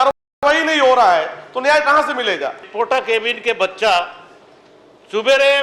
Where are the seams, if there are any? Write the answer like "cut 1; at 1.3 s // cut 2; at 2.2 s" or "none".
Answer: cut 1; at 2.6 s

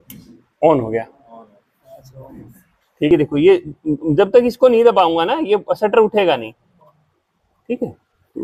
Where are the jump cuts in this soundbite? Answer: cut 1; at 3.1 s

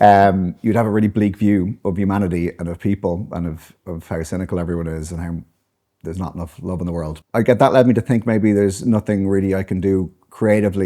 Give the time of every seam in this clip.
cut 1; at 7.1 s

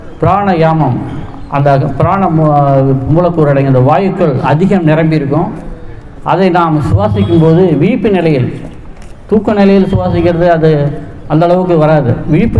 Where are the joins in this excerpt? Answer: none

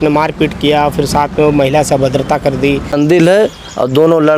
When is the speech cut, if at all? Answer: cut 1; at 2.9 s

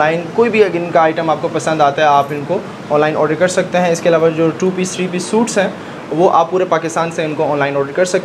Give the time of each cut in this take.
none

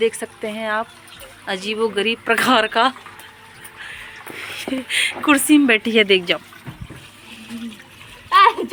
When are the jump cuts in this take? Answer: none

